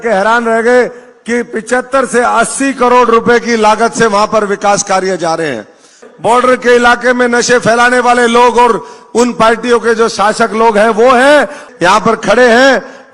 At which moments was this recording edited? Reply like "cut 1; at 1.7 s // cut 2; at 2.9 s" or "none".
cut 1; at 6.0 s // cut 2; at 11.6 s